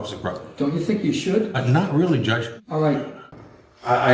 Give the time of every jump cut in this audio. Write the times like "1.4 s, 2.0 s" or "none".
3.2 s